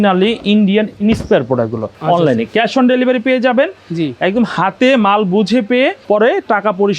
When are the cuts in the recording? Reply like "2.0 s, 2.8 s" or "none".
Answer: 1.9 s, 6.0 s